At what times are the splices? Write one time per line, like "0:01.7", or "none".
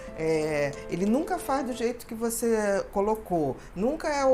none